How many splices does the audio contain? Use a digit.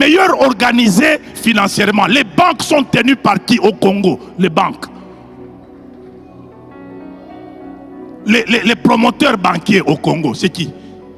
0